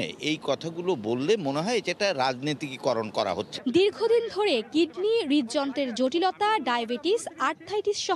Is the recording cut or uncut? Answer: uncut